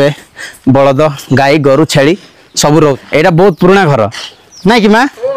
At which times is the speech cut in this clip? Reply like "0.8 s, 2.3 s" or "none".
2.8 s